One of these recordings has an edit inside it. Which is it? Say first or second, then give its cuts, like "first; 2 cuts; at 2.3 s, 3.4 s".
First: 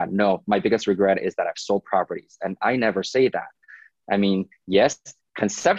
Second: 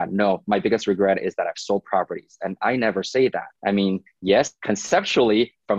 second; 2 cuts; at 3.5 s, 4.6 s